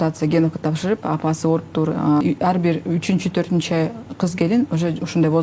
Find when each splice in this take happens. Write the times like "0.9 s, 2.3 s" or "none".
2.2 s

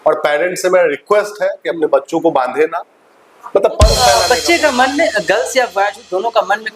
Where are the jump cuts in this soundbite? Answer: 4.0 s

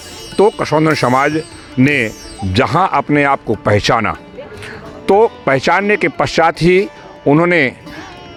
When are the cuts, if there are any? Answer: none

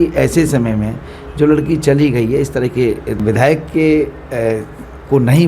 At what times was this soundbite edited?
3.2 s

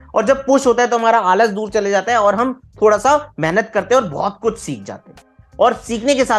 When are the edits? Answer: none

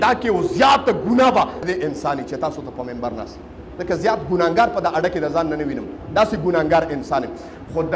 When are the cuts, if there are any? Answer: 1.6 s

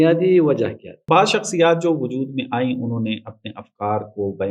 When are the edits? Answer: 1.0 s

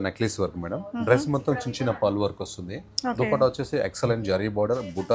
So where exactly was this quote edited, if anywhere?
none

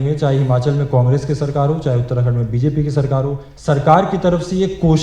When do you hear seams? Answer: 3.5 s

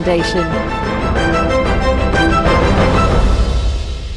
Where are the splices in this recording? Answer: none

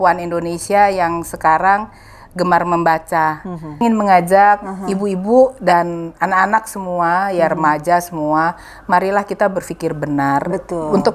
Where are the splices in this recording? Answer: 3.8 s

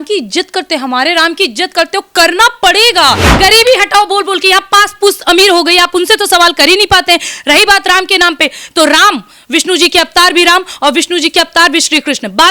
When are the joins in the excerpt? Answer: 3.3 s

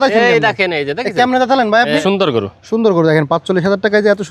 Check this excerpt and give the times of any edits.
2.0 s

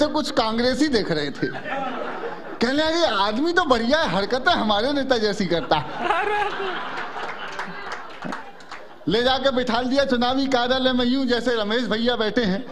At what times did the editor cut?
none

